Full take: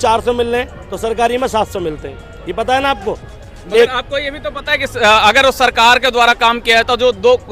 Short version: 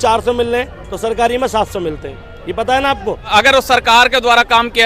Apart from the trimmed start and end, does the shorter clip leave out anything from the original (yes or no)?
yes